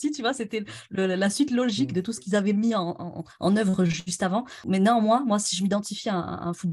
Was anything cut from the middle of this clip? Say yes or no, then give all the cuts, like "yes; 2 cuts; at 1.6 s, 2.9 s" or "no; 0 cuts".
yes; 1 cut; at 4.6 s